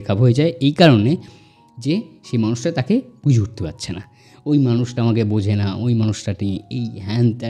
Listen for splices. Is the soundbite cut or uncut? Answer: uncut